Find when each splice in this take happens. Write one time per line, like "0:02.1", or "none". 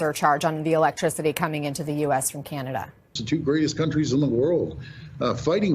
0:03.2